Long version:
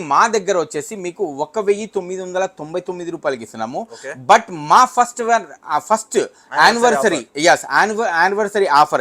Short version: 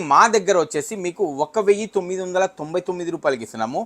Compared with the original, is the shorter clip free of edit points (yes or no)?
yes